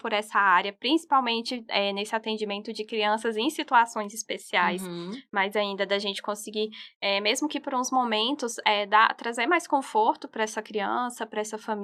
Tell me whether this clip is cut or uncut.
uncut